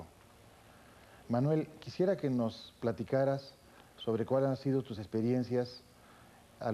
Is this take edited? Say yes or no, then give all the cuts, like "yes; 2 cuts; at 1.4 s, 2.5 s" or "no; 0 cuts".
no; 0 cuts